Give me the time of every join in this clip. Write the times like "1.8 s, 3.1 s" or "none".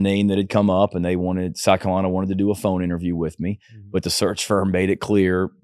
none